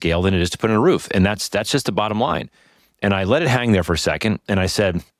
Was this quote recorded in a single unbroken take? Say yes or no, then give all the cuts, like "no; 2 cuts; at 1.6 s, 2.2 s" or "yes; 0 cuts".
yes; 0 cuts